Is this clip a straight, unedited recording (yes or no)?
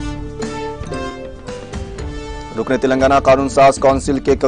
no